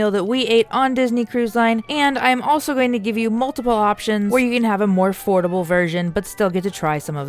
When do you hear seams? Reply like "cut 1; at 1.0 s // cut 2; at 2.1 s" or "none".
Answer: cut 1; at 1.9 s // cut 2; at 4.3 s